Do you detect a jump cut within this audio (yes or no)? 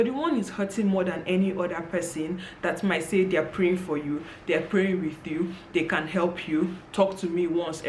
no